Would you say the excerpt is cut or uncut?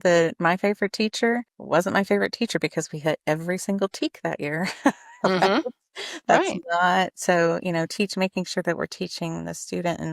cut